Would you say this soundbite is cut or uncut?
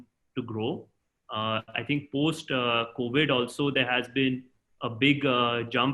uncut